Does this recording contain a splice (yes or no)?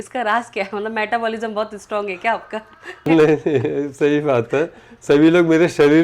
yes